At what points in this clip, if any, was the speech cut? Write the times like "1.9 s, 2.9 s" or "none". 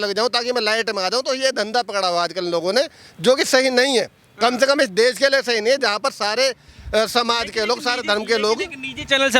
none